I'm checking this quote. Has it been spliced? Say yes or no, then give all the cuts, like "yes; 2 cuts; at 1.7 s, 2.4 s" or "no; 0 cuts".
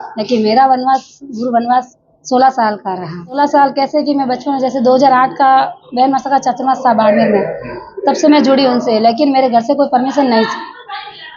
yes; 1 cut; at 3.4 s